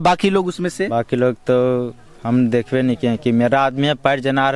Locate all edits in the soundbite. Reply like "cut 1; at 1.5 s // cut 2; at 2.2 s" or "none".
none